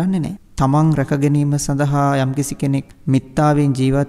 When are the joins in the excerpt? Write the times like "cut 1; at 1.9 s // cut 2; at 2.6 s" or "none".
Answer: cut 1; at 2.9 s